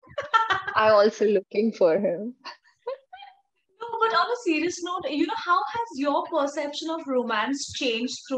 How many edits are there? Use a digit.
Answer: 0